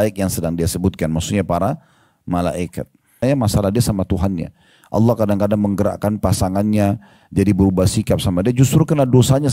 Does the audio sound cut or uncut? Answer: cut